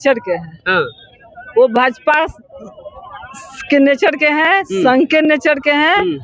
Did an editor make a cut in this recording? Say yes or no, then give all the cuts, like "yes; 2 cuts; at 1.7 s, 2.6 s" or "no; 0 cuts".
no; 0 cuts